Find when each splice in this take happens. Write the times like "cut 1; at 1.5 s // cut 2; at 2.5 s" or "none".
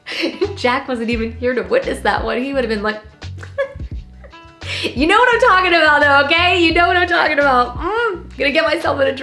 none